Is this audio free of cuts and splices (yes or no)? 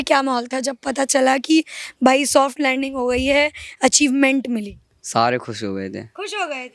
yes